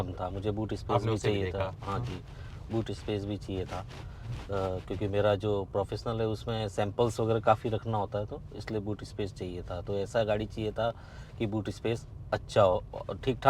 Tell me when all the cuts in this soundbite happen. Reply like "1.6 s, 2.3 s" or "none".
none

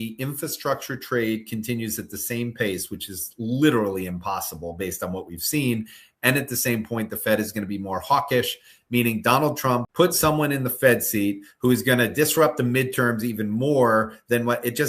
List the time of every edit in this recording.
9.9 s

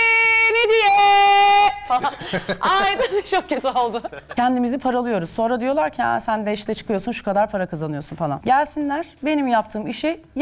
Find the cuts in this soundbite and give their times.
4.2 s, 8.4 s

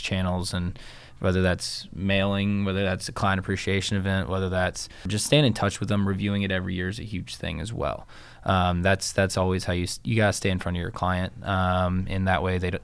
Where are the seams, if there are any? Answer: 5.1 s

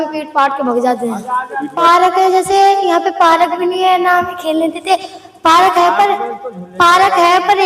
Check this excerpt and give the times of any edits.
1.6 s

